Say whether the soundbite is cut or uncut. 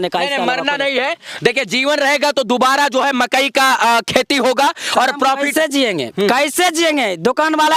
uncut